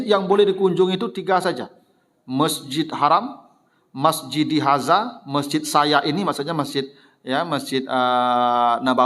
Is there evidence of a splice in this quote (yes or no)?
no